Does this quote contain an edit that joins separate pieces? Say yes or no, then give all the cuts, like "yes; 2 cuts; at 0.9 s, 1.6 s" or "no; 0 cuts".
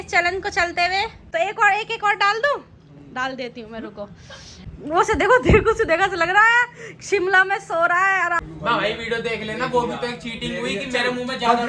yes; 3 cuts; at 1.2 s, 4.6 s, 8.4 s